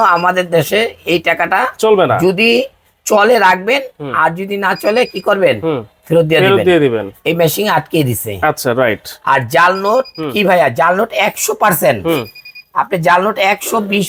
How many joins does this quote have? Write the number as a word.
zero